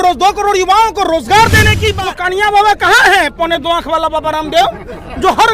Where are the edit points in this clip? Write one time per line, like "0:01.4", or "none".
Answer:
0:01.9